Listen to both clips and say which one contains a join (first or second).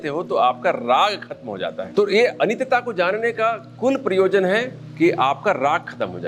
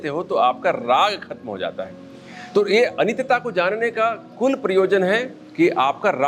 first